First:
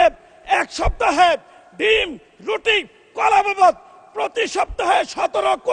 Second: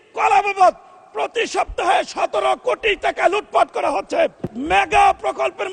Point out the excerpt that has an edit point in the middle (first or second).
second